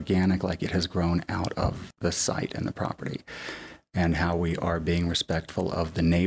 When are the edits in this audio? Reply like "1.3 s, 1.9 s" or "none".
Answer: 1.8 s